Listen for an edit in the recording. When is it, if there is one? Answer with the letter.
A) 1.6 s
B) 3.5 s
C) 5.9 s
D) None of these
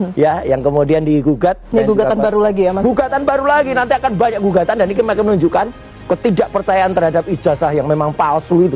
A